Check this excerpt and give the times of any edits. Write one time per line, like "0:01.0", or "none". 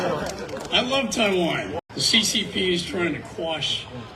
0:01.8